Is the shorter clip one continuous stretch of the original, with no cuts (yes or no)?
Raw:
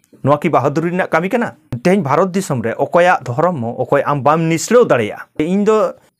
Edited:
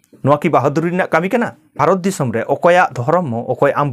no